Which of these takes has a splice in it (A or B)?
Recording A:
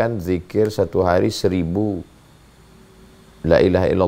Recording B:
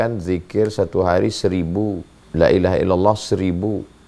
B